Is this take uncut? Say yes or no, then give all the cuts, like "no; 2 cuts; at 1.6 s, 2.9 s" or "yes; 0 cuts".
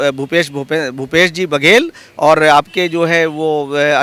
yes; 0 cuts